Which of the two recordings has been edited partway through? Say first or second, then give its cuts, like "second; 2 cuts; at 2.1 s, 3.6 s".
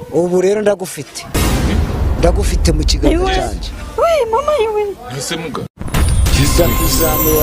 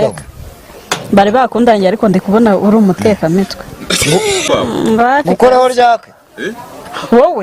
second; 1 cut; at 4.5 s